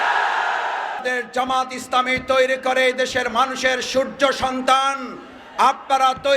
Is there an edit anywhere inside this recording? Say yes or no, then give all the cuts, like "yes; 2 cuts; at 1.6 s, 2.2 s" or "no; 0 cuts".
yes; 1 cut; at 1.0 s